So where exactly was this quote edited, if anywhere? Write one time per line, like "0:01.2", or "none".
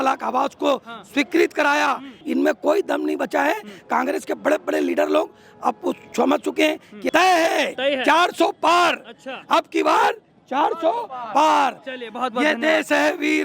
0:02.1
0:07.0